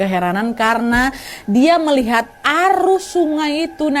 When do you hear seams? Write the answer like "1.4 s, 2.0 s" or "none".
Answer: none